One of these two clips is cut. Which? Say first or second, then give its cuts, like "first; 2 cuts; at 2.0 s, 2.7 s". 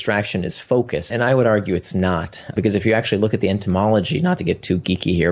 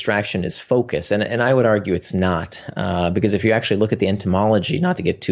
first; 2 cuts; at 1.1 s, 2.5 s